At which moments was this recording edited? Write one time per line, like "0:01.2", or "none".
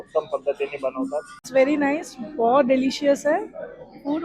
0:01.4